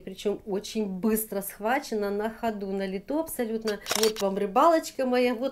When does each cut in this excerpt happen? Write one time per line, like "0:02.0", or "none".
0:03.9